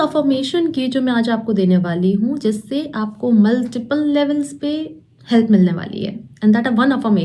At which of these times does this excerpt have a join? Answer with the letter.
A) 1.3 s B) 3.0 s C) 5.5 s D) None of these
D